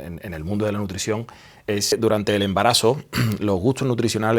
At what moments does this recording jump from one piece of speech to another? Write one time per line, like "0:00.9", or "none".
0:01.9

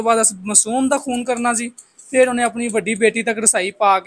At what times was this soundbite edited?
none

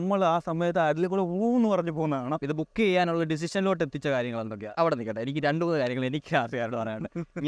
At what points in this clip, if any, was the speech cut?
0:02.4
0:04.7

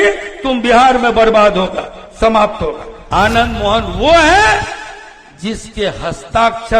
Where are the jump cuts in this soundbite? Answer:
0:02.9

